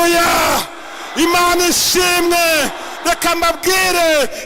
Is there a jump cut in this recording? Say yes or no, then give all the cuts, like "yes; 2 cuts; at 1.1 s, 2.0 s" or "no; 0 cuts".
no; 0 cuts